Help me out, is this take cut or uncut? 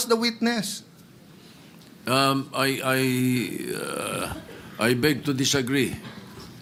uncut